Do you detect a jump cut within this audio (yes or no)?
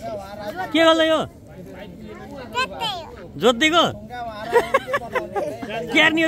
no